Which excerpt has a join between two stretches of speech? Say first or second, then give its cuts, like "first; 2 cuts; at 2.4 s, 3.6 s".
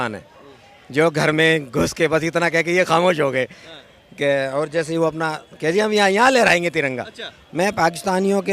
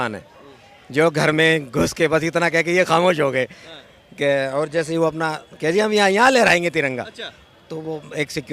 first; 1 cut; at 7.4 s